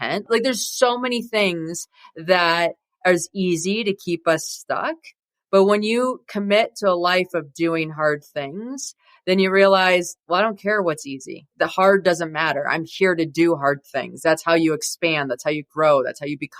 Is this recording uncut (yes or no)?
no